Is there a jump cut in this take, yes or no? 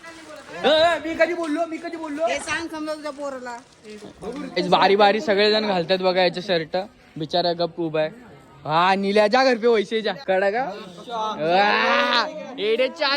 yes